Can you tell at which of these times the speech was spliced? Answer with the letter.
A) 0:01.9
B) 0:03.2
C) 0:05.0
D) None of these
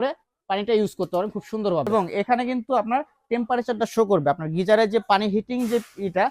A